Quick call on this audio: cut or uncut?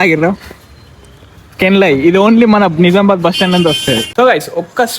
cut